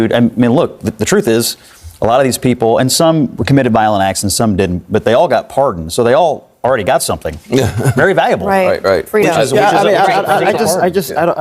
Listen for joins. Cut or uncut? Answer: uncut